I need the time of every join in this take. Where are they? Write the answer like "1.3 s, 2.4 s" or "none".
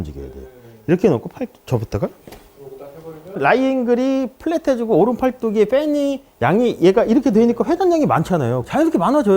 3.4 s